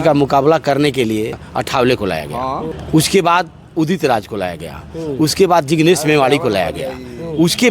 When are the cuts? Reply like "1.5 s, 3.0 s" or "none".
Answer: 1.4 s, 2.7 s